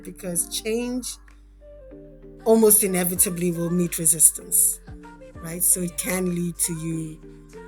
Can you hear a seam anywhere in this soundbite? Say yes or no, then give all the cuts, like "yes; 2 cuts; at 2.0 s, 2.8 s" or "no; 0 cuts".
yes; 1 cut; at 5.3 s